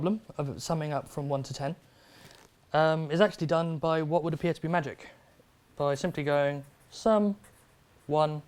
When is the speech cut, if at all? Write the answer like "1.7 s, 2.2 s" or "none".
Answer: none